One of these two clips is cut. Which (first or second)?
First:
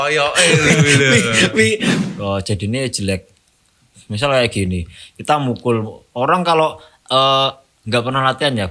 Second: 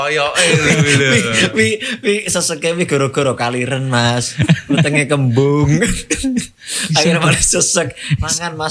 first